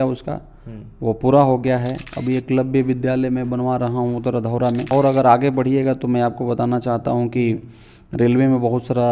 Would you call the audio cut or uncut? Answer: cut